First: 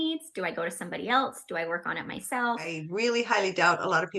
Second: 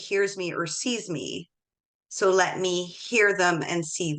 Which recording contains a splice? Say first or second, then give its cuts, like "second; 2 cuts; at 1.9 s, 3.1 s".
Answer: first; 1 cut; at 2.8 s